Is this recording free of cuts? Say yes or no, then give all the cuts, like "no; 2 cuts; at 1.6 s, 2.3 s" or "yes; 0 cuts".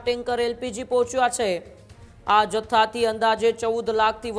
yes; 0 cuts